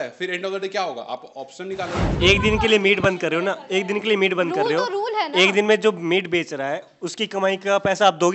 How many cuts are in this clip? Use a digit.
1